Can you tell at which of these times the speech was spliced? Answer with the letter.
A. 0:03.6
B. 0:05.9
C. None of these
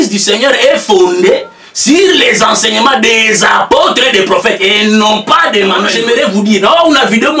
B